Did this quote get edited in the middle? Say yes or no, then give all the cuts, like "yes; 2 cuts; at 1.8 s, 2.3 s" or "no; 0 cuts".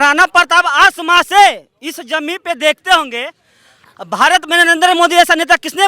no; 0 cuts